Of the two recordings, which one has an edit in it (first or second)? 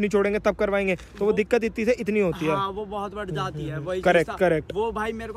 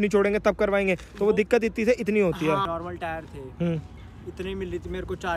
second